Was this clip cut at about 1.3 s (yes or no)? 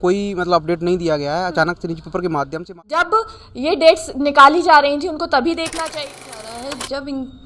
no